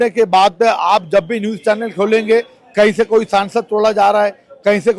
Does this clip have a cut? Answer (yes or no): no